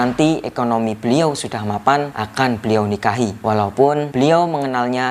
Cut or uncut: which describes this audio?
cut